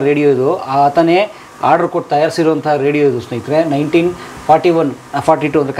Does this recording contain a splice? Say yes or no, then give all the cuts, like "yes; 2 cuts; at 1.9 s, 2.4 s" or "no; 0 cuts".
no; 0 cuts